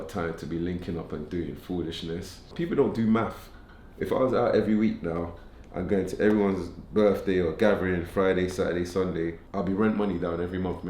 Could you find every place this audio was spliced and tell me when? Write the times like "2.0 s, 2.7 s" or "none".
2.5 s, 9.4 s

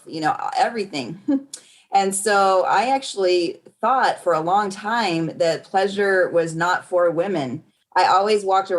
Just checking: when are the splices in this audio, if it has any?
7.7 s

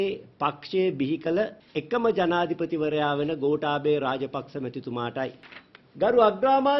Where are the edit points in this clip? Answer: 5.4 s

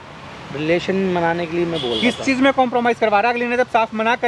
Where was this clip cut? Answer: none

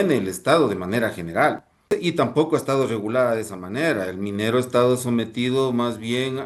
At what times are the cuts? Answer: 1.9 s

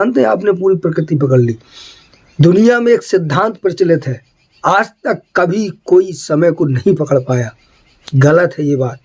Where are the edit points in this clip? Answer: none

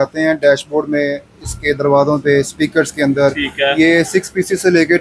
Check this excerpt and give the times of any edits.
none

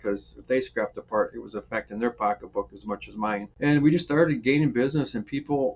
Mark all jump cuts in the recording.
3.5 s

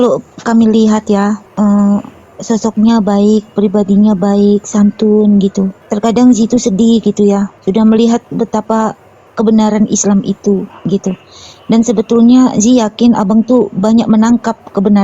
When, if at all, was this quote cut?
1.5 s, 5.8 s, 7.5 s

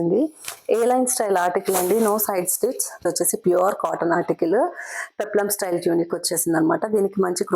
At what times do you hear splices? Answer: 3.1 s

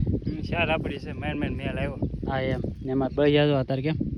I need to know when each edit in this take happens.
none

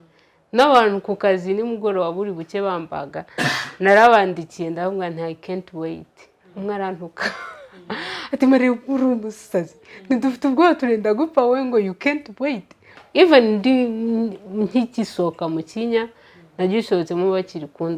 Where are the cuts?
12.9 s

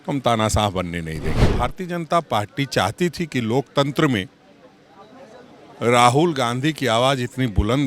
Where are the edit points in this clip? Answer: 1.4 s

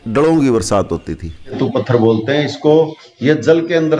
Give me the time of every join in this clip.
1.5 s

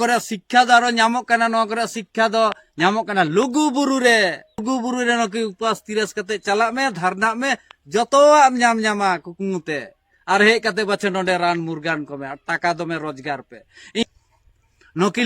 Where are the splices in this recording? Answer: 4.6 s, 14.0 s

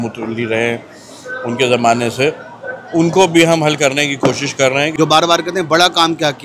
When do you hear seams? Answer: 4.9 s

